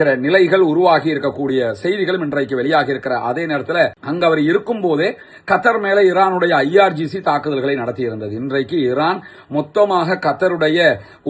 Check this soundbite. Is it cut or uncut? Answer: cut